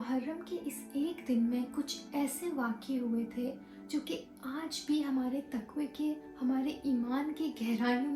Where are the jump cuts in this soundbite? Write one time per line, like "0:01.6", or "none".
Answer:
none